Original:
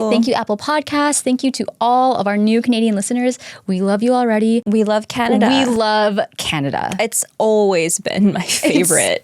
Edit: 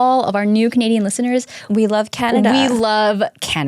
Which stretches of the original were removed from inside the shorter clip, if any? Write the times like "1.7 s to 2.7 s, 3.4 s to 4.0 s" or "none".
3.6 s to 4.6 s